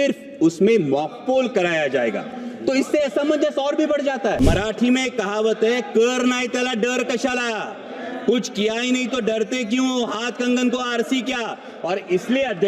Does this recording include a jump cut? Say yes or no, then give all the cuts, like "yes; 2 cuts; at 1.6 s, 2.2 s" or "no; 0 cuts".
yes; 1 cut; at 4.4 s